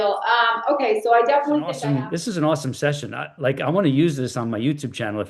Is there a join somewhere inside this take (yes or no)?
yes